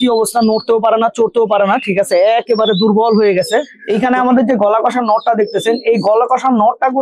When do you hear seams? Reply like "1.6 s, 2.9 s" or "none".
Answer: 3.8 s